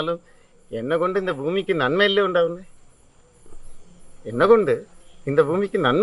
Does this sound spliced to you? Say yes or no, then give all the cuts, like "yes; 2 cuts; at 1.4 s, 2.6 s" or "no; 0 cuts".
no; 0 cuts